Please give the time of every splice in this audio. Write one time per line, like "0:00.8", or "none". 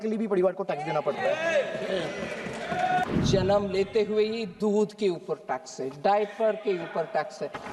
0:03.0